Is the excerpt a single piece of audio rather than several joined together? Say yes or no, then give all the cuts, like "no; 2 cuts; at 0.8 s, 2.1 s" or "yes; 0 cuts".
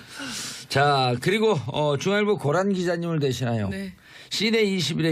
yes; 0 cuts